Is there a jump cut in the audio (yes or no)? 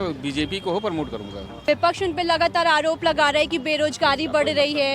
yes